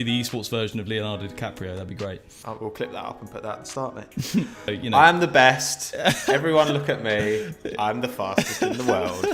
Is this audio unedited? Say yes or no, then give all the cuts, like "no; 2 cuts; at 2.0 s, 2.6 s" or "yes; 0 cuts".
no; 2 cuts; at 2.4 s, 4.7 s